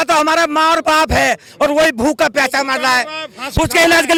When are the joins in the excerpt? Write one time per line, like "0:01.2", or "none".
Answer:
none